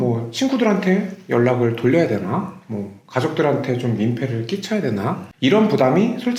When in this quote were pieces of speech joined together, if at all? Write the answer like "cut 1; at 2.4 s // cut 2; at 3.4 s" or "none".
none